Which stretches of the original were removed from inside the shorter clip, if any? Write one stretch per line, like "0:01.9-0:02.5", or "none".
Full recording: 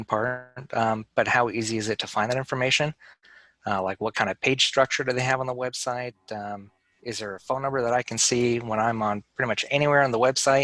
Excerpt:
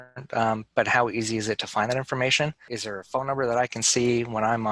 0:03.1-0:07.0